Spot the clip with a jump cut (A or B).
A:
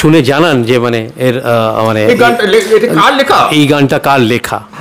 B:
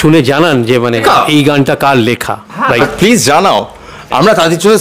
B